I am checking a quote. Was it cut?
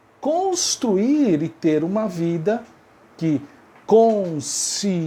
no; 0 cuts

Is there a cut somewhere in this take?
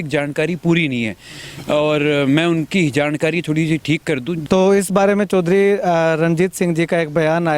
yes; 1 cut; at 4.3 s

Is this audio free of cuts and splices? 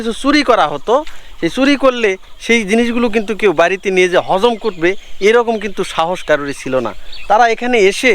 yes; 0 cuts

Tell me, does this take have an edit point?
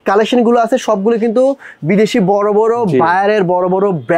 no; 0 cuts

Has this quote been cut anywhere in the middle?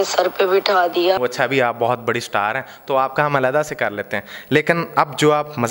yes; 1 cut; at 1.2 s

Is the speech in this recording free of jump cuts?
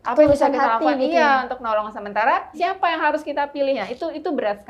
no; 1 cut; at 2.6 s

